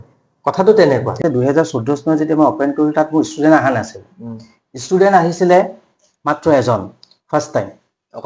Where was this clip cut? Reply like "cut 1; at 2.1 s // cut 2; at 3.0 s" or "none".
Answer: cut 1; at 1.2 s